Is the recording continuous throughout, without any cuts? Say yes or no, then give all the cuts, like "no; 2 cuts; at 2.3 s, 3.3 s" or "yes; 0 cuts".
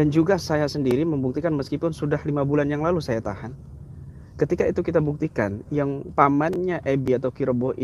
yes; 0 cuts